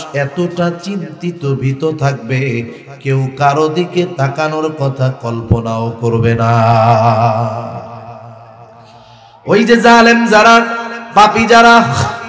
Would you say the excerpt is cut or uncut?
uncut